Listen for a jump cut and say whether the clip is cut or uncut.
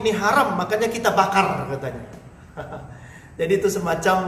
uncut